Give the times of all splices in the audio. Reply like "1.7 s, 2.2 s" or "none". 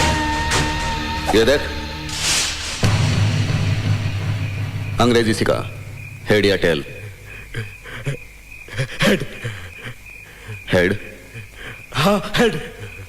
none